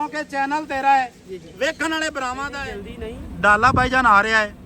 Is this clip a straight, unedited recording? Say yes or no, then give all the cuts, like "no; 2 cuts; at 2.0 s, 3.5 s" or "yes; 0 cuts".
no; 1 cut; at 2.5 s